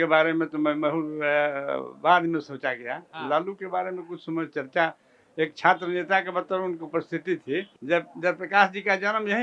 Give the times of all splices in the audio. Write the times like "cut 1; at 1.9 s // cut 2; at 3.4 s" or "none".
cut 1; at 7.7 s